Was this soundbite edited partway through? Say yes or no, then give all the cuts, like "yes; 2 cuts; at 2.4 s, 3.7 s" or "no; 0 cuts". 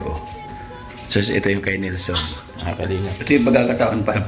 yes; 1 cut; at 3.2 s